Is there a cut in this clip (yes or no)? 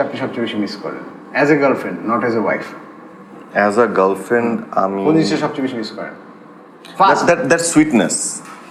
no